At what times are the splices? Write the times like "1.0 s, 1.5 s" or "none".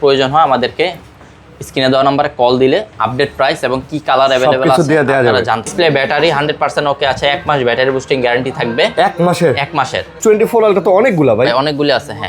5.7 s, 10.2 s